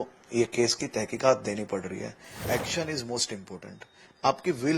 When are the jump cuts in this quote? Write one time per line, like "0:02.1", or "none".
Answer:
0:02.3